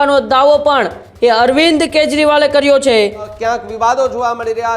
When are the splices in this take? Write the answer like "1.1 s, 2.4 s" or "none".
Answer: 3.3 s